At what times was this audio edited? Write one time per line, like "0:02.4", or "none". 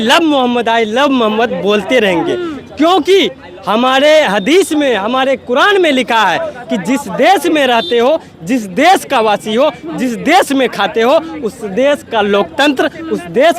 none